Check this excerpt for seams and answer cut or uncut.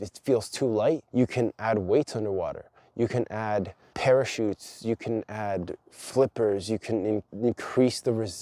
cut